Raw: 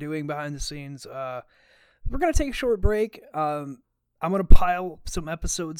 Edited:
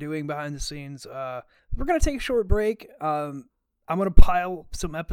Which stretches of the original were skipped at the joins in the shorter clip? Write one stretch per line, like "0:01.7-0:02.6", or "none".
0:01.6-0:01.9